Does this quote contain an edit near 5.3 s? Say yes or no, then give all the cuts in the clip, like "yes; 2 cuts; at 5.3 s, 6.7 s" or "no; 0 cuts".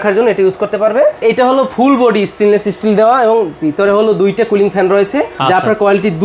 yes; 2 cuts; at 1.2 s, 5.3 s